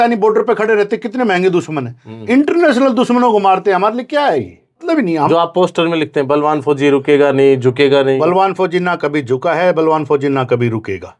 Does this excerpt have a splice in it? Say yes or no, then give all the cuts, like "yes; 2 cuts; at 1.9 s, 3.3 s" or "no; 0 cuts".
yes; 1 cut; at 4.8 s